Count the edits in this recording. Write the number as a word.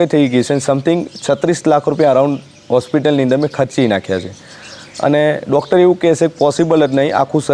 zero